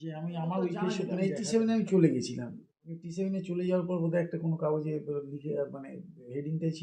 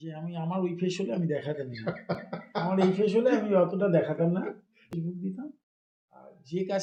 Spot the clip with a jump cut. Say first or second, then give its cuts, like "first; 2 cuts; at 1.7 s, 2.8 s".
first; 1 cut; at 1.1 s